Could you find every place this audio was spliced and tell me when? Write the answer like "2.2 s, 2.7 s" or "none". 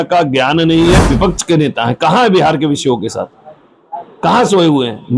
1.0 s